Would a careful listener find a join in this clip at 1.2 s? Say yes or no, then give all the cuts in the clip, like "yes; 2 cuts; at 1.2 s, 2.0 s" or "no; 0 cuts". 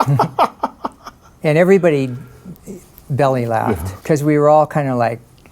no; 1 cut; at 3.9 s